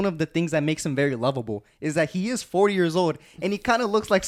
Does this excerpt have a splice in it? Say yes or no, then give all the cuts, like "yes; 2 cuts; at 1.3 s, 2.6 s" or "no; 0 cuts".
no; 0 cuts